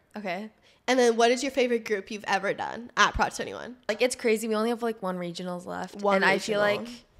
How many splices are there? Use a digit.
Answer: 1